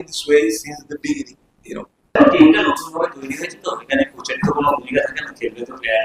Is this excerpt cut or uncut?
cut